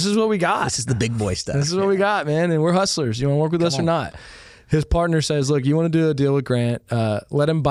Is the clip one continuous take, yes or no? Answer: yes